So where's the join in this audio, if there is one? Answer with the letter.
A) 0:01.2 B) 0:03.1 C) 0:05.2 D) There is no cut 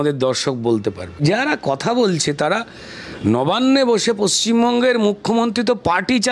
A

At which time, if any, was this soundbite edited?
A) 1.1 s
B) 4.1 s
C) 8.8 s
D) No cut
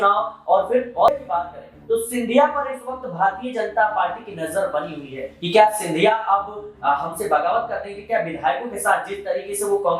A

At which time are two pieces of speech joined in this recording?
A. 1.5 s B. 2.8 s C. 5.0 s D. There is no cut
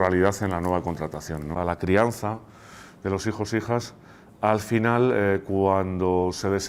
A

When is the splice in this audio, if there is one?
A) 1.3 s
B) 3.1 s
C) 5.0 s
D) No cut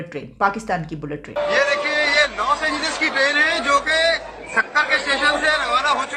A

